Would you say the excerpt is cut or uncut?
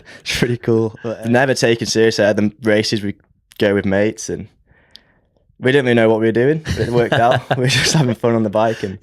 cut